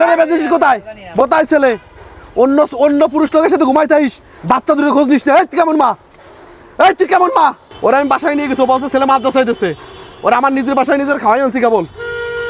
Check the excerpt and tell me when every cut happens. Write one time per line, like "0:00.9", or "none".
0:01.2
0:07.7